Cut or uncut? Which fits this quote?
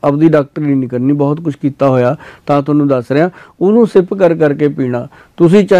uncut